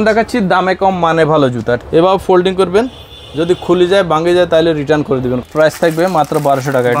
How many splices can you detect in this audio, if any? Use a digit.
2